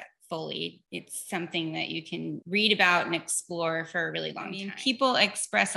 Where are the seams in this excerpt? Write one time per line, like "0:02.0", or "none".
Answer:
0:02.4
0:04.7